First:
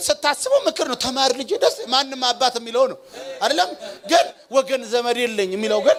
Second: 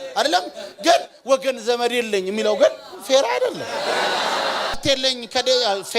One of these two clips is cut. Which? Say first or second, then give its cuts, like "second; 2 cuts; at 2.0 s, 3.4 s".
second; 1 cut; at 4.8 s